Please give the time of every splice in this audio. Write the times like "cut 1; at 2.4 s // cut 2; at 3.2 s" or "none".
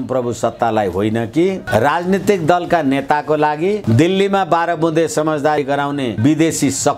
cut 1; at 1.6 s // cut 2; at 3.8 s // cut 3; at 5.6 s